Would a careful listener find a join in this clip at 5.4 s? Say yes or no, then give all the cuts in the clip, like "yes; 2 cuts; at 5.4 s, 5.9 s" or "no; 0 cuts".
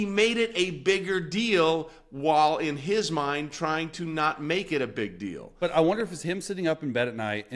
yes; 1 cut; at 5.4 s